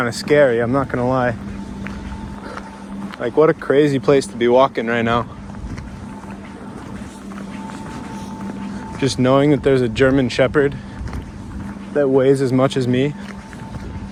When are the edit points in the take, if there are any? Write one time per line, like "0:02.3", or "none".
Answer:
none

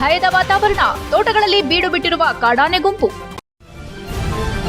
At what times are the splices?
0:03.4

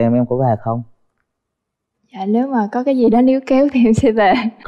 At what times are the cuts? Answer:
none

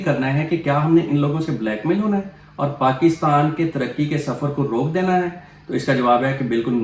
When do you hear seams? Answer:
none

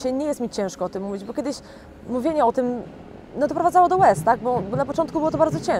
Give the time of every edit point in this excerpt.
none

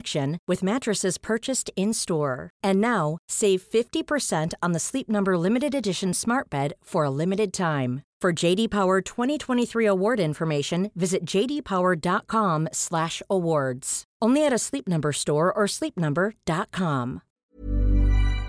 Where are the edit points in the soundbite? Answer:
0:17.3

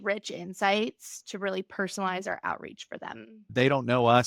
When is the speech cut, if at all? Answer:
0:03.4

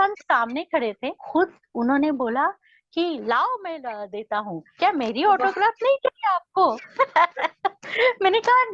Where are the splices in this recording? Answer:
0:01.2

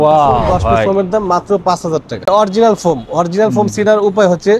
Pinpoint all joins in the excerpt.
0:00.9
0:02.3

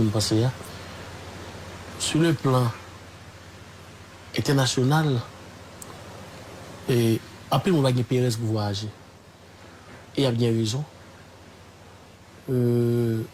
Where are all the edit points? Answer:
none

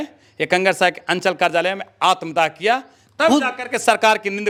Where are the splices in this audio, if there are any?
none

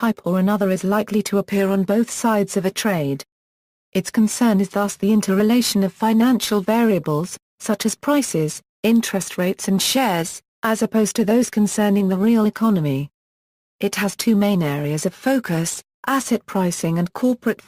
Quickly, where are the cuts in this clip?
0:16.5

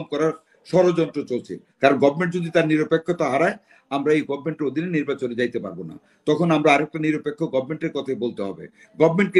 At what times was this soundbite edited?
0:01.6

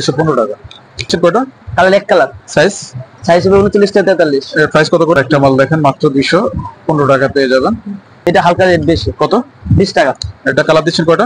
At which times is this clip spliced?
0:01.1
0:05.2
0:08.3

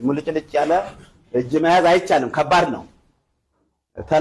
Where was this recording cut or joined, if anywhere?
none

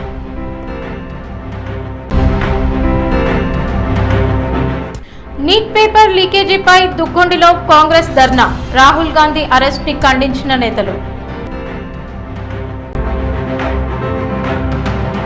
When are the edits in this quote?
0:12.9

